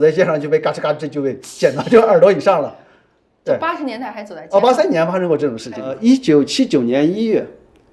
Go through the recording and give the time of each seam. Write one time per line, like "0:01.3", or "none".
0:05.9